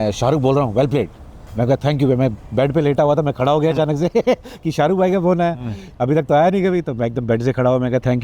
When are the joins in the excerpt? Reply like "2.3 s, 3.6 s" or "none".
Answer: none